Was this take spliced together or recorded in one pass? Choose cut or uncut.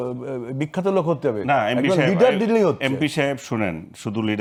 uncut